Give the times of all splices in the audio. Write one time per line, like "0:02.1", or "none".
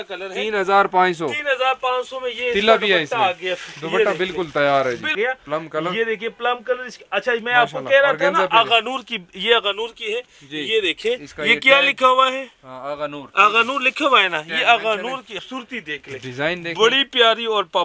0:05.1
0:15.4